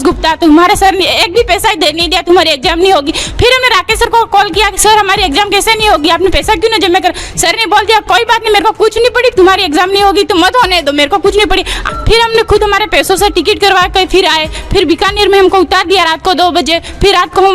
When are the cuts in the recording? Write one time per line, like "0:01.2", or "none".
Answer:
0:11.9